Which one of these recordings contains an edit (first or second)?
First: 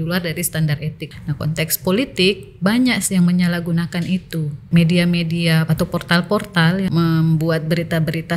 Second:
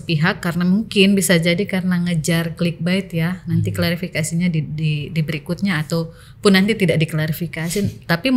first